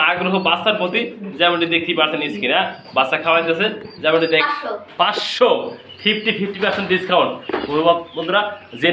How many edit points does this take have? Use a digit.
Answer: 1